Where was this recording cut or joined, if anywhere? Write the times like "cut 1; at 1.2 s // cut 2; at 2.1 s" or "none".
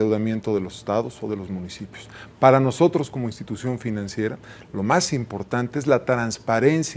none